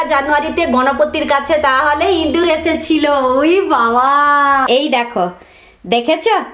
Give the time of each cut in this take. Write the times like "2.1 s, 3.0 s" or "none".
4.7 s

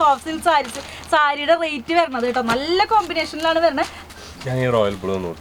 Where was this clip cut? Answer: none

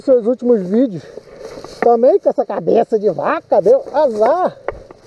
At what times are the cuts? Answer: none

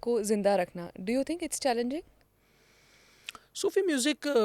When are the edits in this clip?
none

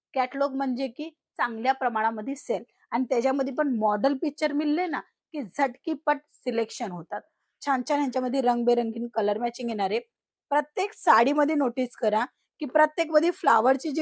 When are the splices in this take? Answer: none

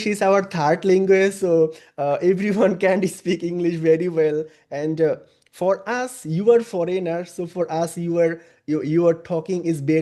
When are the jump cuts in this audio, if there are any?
none

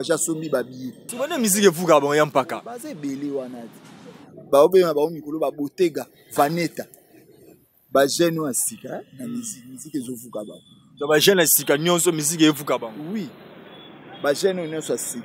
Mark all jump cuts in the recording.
1.0 s

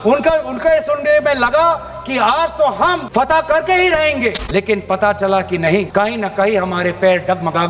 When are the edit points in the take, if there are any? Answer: 3.1 s, 4.4 s, 5.9 s

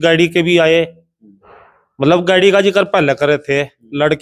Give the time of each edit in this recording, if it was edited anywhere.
none

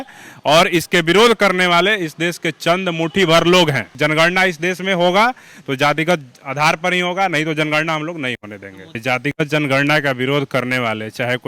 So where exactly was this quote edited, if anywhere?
3.9 s, 9.0 s

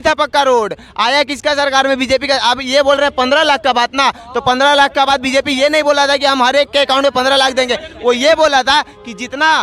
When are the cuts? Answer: none

